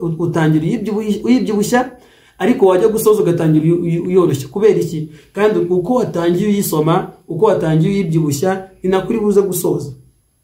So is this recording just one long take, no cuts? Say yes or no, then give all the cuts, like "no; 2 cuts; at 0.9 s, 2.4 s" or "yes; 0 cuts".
yes; 0 cuts